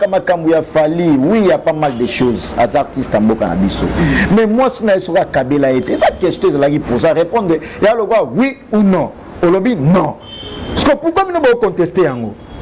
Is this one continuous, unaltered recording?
yes; 0 cuts

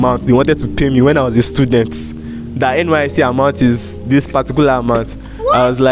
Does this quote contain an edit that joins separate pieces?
no; 0 cuts

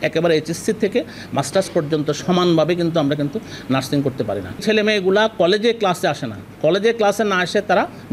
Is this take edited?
no; 0 cuts

